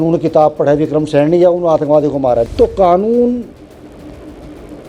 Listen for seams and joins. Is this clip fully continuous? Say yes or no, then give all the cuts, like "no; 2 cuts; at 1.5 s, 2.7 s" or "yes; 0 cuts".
no; 1 cut; at 2.5 s